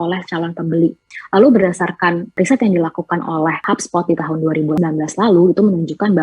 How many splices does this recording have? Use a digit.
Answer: 4